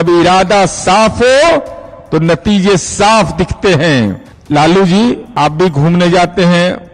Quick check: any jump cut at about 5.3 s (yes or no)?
yes